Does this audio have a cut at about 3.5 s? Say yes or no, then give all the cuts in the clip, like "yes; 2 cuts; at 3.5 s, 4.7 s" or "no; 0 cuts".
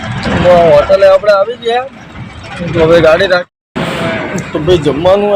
yes; 1 cut; at 3.5 s